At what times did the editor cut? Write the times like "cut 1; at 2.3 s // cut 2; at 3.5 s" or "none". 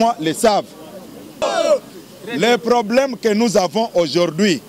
cut 1; at 1.4 s